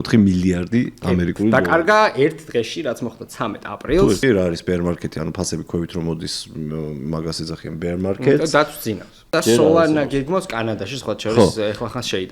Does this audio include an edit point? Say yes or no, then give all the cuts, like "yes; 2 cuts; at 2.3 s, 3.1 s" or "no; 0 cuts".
yes; 2 cuts; at 4.2 s, 9.2 s